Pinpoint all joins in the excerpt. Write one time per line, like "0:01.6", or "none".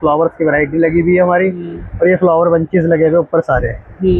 none